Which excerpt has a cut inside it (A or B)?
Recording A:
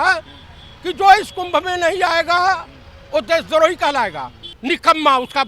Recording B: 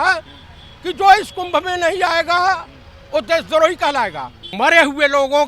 B